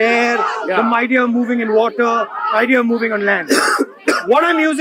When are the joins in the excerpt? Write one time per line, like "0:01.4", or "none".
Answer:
none